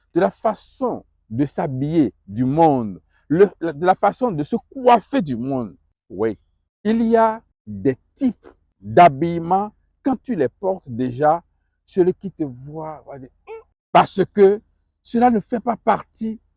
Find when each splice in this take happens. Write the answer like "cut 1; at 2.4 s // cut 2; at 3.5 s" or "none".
none